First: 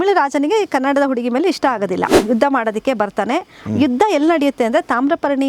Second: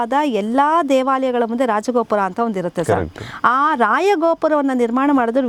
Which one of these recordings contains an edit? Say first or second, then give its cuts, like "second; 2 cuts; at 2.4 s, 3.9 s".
first; 1 cut; at 2.1 s